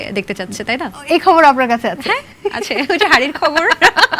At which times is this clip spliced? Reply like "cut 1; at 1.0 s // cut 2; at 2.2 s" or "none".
none